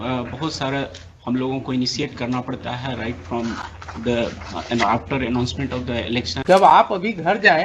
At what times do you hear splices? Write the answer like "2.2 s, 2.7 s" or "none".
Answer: 6.3 s